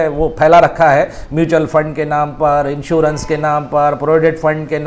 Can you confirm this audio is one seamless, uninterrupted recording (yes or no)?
yes